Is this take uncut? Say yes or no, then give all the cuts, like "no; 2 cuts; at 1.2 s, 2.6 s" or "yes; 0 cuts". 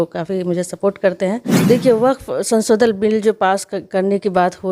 no; 1 cut; at 1.5 s